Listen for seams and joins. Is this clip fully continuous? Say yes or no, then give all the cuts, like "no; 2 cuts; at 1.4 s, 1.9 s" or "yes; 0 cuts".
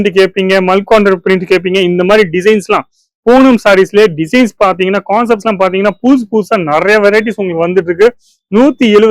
yes; 0 cuts